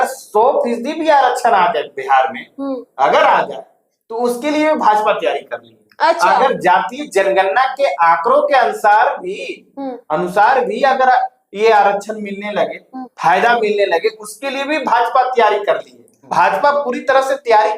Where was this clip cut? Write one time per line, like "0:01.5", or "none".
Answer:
none